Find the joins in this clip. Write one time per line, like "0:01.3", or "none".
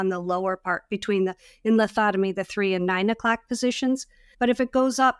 0:04.2